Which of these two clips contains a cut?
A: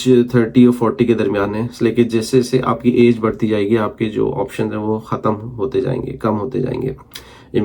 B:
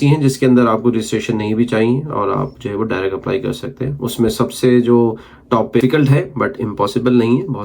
B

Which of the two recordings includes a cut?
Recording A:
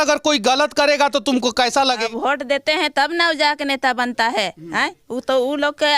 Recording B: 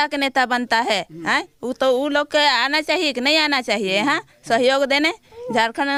A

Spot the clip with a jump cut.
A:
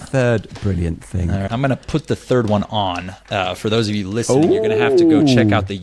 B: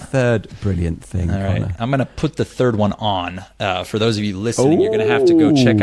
A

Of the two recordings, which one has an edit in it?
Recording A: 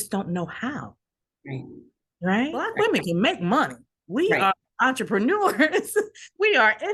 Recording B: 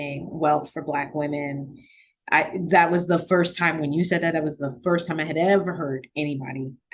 A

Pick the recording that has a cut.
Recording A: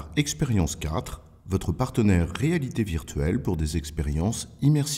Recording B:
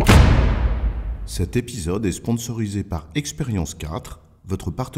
B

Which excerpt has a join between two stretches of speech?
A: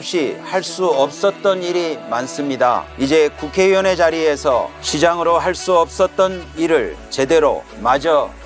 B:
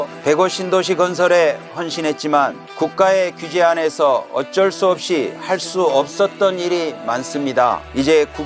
A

